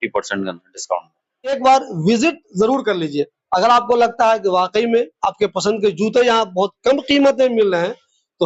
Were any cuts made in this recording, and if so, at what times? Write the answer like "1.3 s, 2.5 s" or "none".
1.6 s